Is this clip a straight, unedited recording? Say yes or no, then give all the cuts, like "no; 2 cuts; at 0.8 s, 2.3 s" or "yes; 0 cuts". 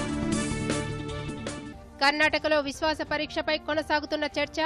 yes; 0 cuts